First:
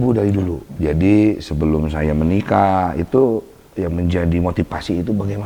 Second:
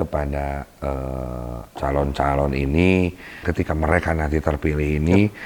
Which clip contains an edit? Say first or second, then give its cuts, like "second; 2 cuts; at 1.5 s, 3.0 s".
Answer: second; 2 cuts; at 1.6 s, 3.4 s